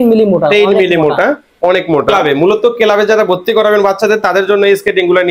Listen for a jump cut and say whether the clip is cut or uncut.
cut